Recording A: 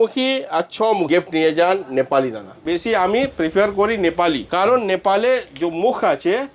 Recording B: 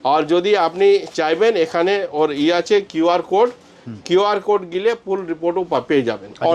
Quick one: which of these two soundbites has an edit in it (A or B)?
A